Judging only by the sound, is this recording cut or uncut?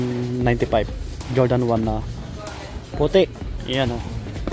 uncut